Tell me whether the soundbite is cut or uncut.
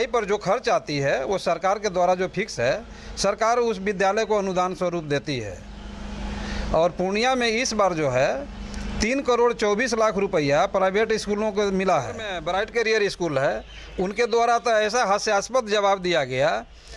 cut